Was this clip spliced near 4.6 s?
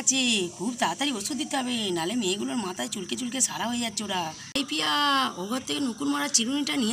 yes; 1 cut; at 4.6 s

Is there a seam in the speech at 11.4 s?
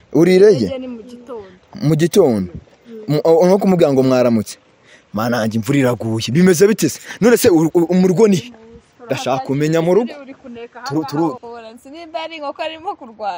yes; 1 cut; at 11.4 s

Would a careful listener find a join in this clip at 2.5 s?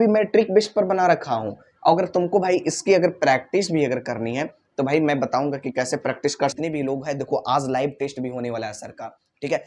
no; 1 cut; at 6.5 s

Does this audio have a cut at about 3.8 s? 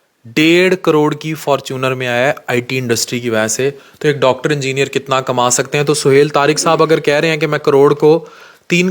no; 0 cuts

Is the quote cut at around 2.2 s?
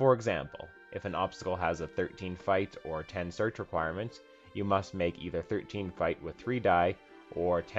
yes; 1 cut; at 2.2 s

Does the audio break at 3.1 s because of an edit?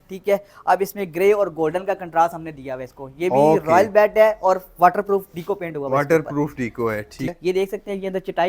no; 1 cut; at 7.3 s

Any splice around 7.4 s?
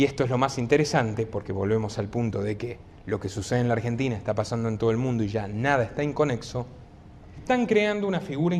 yes; 1 cut; at 7.4 s

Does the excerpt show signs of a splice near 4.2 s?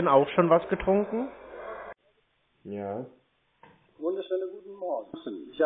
no; 1 cut; at 1.9 s

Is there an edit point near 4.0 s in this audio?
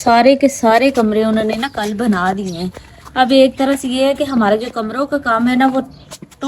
no; 0 cuts

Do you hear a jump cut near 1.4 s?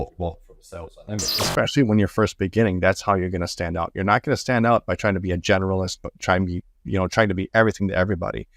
yes; 1 cut; at 1.4 s

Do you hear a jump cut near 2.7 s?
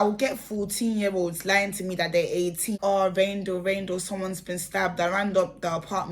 yes; 1 cut; at 2.7 s

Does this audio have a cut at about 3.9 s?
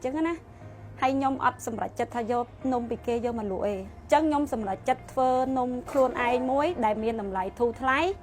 yes; 1 cut; at 3.9 s

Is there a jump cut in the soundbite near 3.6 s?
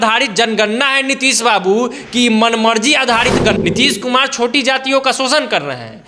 yes; 1 cut; at 3.6 s

